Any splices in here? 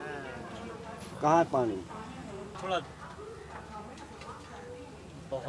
yes; 1 cut; at 2.6 s

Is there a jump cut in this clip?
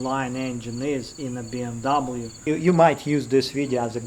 yes; 1 cut; at 2.5 s

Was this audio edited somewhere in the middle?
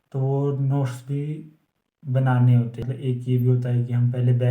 yes; 1 cut; at 2.9 s

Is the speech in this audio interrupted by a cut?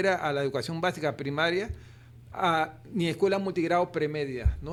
no; 0 cuts

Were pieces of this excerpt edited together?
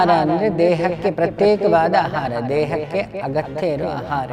no; 0 cuts

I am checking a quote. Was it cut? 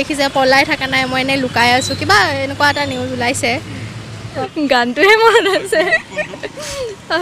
yes; 1 cut; at 4.5 s

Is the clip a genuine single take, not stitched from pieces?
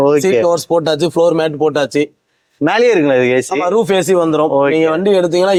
yes; 0 cuts

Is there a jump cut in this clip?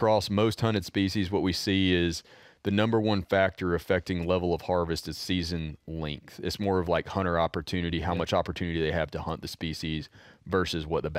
no; 0 cuts

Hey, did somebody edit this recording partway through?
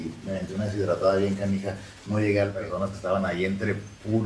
yes; 1 cut; at 2.5 s

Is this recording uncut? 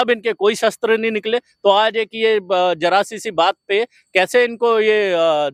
yes; 0 cuts

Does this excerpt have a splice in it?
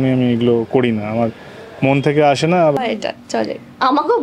yes; 1 cut; at 2.8 s

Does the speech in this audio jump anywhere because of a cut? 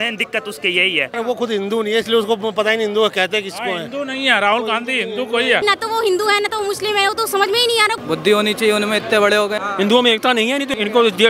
yes; 4 cuts; at 1.1 s, 5.6 s, 8.0 s, 9.6 s

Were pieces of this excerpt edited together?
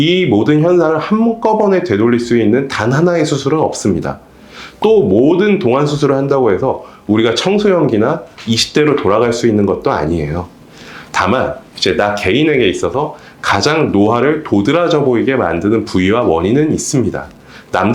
no; 0 cuts

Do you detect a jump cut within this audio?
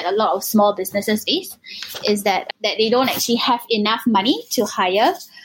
no; 0 cuts

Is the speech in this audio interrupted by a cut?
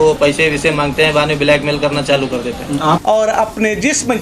yes; 1 cut; at 3.0 s

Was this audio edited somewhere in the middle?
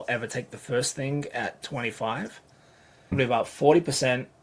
yes; 1 cut; at 3.1 s

